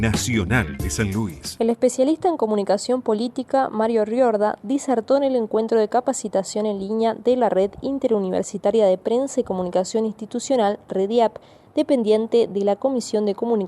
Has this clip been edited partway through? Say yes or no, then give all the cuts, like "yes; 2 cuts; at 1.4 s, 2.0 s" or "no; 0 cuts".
yes; 1 cut; at 1.4 s